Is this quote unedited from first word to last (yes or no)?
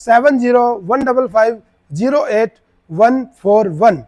yes